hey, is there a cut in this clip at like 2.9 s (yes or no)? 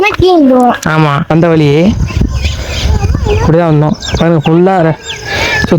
no